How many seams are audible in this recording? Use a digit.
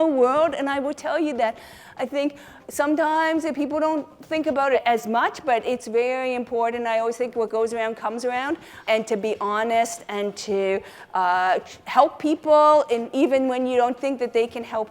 2